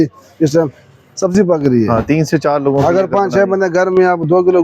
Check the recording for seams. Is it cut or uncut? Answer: uncut